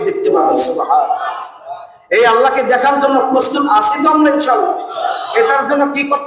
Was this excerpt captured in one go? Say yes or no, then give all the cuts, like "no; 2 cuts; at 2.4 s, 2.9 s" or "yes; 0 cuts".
yes; 0 cuts